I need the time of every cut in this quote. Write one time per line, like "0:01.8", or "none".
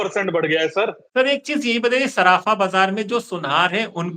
0:01.0